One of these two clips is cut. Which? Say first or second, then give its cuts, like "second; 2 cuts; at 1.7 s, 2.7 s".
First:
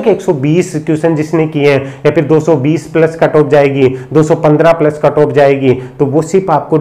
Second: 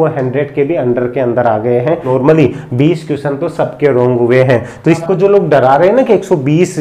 second; 2 cuts; at 2.1 s, 5.0 s